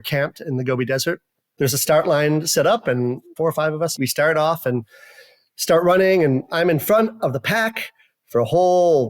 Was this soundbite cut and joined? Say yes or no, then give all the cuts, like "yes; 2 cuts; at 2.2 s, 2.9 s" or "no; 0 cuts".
yes; 1 cut; at 3.9 s